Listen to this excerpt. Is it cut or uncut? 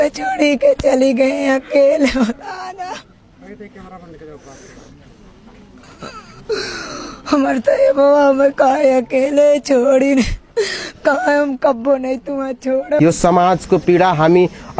uncut